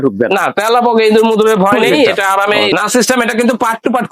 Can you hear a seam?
yes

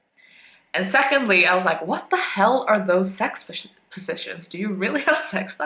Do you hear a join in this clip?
no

